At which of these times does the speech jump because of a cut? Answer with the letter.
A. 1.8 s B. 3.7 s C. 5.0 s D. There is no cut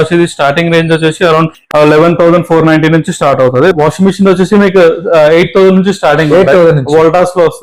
B